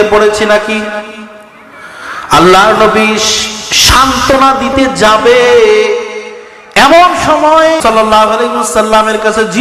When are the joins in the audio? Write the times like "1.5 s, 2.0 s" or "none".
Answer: 7.8 s